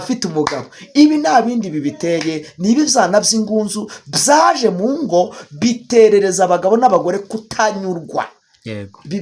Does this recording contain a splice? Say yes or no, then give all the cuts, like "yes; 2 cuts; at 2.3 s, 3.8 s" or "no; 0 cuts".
no; 0 cuts